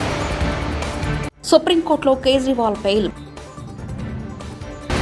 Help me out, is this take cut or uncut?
cut